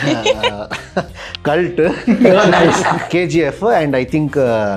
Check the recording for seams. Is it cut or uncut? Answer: cut